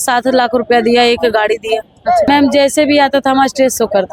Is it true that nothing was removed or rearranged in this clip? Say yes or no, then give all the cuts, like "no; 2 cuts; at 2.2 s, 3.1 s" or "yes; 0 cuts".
no; 1 cut; at 2.3 s